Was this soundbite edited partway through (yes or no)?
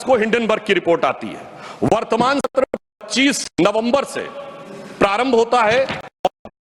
no